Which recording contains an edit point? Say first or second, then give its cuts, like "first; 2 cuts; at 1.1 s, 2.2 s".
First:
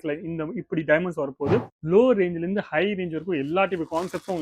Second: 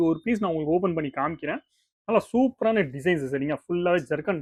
first; 1 cut; at 1.7 s